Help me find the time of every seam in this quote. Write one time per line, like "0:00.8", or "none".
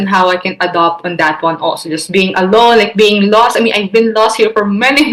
none

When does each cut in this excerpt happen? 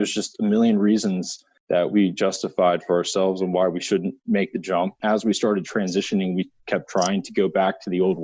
0:05.0

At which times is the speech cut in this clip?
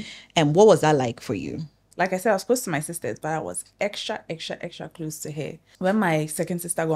0:01.8
0:05.6

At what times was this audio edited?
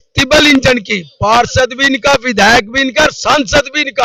none

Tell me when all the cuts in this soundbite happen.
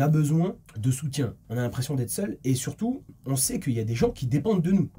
0:01.2
0:03.1

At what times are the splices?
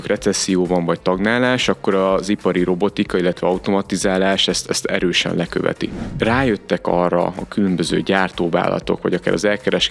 0:06.1

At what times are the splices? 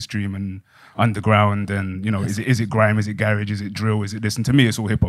none

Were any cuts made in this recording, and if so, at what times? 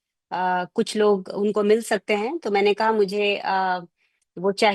none

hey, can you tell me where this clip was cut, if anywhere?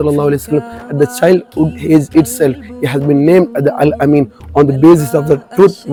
none

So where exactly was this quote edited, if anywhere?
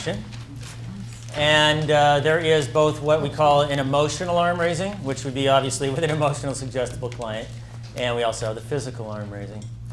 0:08.5

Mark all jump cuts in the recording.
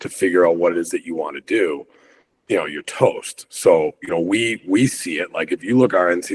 none

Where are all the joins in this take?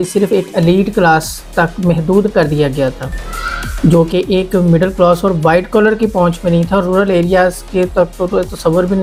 none

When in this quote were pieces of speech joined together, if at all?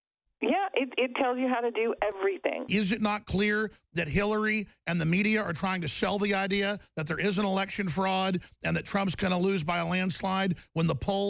0:02.4

